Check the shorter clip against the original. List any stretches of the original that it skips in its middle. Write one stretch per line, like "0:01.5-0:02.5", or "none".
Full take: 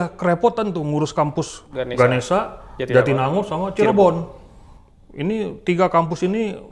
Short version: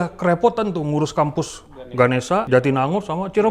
0:02.5-0:02.9